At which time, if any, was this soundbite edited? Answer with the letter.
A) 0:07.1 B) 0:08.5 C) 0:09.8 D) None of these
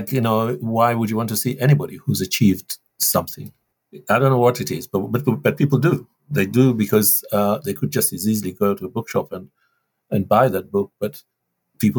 D